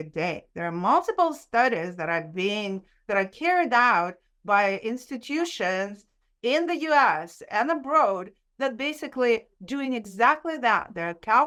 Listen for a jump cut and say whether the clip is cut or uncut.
uncut